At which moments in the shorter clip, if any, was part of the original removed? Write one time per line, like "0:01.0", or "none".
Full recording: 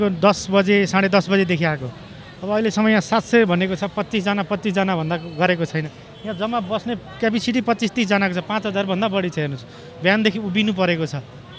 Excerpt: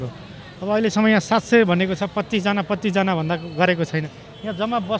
none